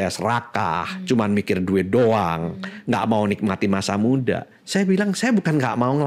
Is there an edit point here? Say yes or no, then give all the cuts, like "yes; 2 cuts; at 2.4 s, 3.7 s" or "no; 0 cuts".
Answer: no; 0 cuts